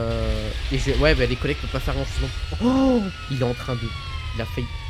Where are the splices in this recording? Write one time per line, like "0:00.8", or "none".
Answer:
none